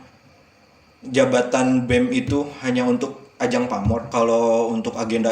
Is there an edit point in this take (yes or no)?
yes